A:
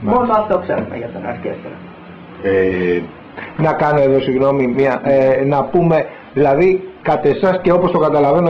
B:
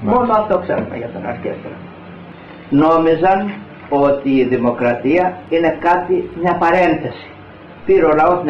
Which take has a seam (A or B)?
B